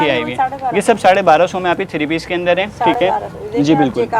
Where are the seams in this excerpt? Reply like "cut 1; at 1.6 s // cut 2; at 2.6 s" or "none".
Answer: none